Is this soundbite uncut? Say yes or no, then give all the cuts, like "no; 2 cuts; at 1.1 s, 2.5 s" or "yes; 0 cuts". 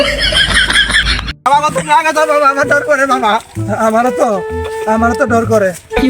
no; 1 cut; at 1.0 s